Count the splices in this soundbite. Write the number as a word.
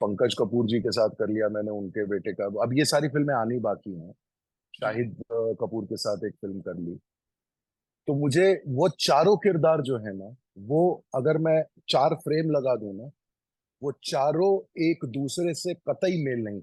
zero